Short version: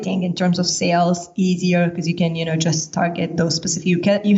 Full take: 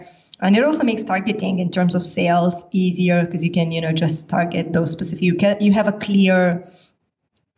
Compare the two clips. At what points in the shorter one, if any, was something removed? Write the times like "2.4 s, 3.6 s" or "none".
none